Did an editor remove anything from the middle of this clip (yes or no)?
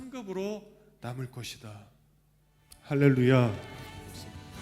yes